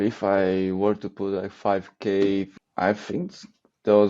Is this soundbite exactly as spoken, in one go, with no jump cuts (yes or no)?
no